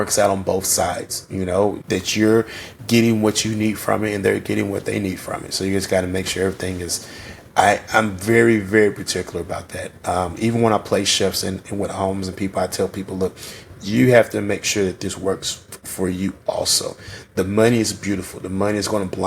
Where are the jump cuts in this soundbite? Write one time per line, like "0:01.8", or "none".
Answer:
none